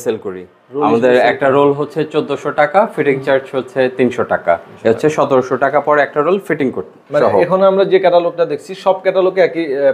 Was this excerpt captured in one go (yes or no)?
yes